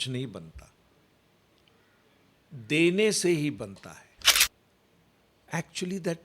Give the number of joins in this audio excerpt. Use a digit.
1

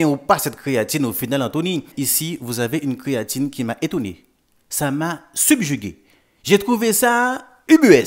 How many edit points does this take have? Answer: 1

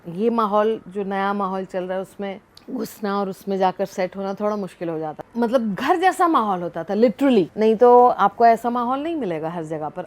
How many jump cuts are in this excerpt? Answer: 3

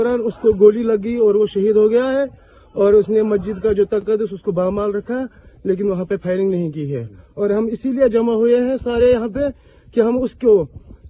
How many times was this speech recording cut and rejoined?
0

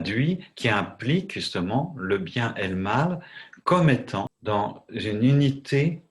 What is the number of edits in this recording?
1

